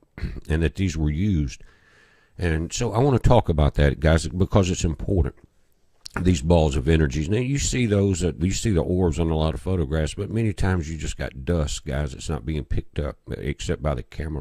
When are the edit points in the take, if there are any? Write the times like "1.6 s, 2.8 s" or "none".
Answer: 1.5 s